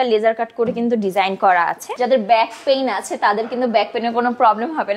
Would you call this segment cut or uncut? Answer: cut